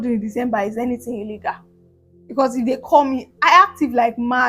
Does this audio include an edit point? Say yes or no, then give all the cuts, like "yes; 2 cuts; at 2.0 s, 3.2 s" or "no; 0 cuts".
no; 0 cuts